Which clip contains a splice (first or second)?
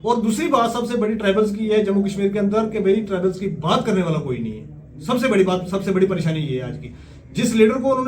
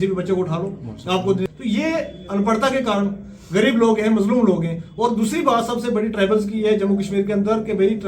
second